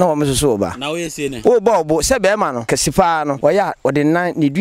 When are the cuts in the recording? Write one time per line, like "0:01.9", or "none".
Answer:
0:01.3
0:02.9